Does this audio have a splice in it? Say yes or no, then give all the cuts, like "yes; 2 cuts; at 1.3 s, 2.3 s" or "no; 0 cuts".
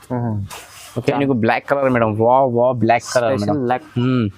yes; 1 cut; at 1.2 s